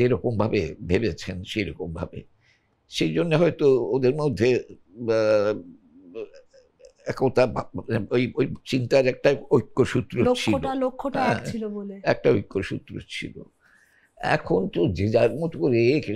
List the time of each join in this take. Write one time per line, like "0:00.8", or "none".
none